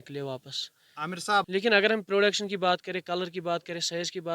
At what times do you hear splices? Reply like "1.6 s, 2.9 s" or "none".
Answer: 1.5 s

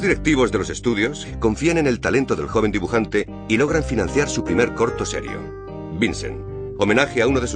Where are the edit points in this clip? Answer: 2.6 s

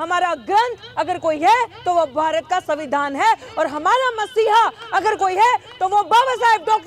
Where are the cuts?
none

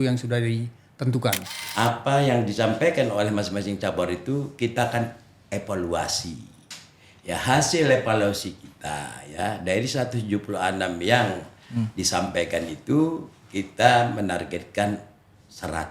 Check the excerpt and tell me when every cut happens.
1.6 s

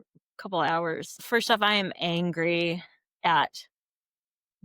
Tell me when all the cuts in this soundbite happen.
1.1 s

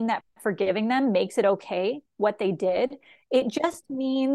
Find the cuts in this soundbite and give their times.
none

